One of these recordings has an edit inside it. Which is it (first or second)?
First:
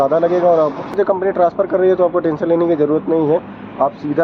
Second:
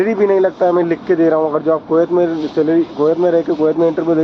first